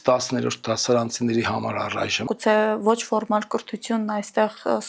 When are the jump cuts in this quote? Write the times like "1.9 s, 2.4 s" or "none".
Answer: 2.3 s